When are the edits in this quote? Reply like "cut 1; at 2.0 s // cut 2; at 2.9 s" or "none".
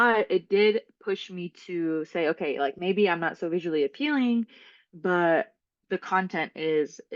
none